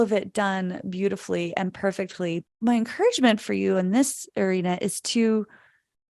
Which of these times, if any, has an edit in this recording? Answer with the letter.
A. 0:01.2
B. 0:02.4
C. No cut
B